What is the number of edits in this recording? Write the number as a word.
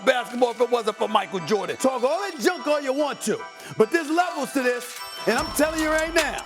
one